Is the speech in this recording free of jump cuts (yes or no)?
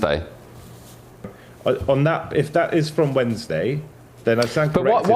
no